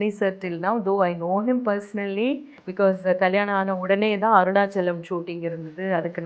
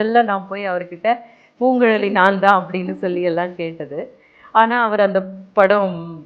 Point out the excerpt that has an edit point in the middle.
first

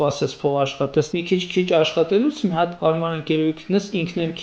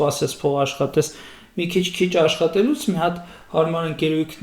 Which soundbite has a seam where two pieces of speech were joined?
first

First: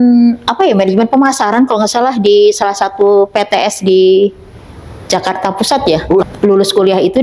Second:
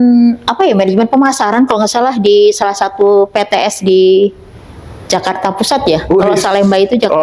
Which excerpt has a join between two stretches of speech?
first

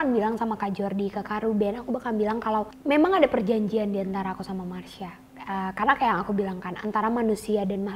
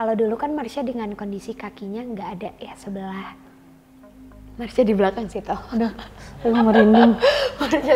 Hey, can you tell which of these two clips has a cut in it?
first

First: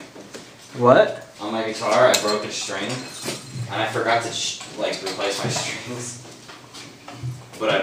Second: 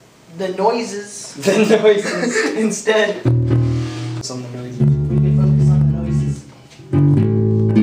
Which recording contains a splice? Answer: second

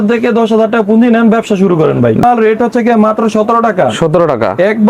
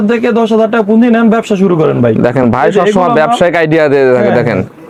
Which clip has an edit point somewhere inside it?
first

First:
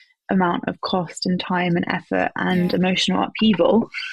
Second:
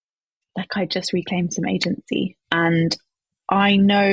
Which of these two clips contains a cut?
second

